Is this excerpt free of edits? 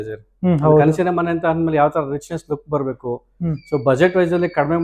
yes; 0 cuts

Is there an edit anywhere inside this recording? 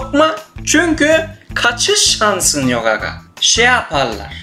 no; 0 cuts

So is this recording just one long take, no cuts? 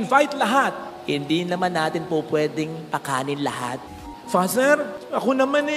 no; 1 cut; at 3.9 s

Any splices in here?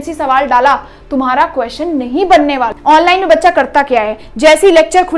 yes; 1 cut; at 2.7 s

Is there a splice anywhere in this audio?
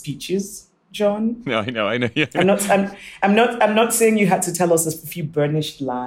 no; 0 cuts

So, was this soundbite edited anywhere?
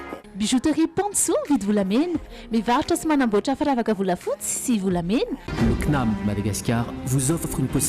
yes; 1 cut; at 5.4 s

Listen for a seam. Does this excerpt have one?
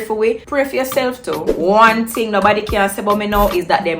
yes; 1 cut; at 1.5 s

